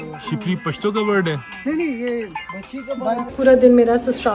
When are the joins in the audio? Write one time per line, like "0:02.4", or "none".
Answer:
0:03.3